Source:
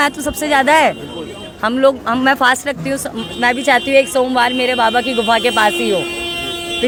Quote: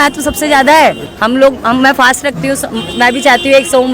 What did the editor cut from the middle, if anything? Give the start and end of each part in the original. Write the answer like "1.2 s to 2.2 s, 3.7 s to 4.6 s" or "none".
1.1 s to 1.6 s